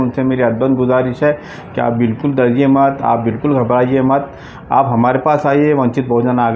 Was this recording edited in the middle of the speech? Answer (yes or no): no